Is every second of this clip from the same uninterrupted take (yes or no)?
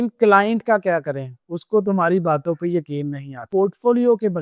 no